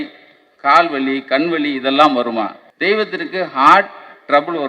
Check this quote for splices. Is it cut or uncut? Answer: cut